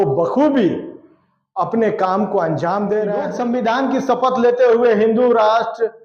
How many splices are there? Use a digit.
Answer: 1